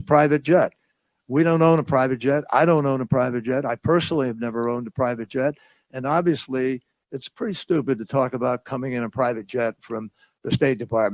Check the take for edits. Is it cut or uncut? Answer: cut